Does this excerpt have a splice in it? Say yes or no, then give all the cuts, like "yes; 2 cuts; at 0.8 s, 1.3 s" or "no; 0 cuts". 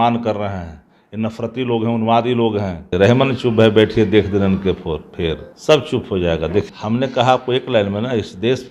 yes; 3 cuts; at 2.9 s, 5.5 s, 6.7 s